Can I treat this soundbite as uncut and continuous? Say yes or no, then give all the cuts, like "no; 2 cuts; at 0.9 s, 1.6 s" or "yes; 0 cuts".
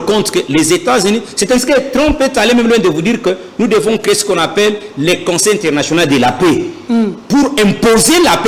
yes; 0 cuts